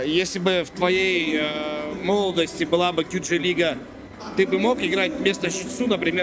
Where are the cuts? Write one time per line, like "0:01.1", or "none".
none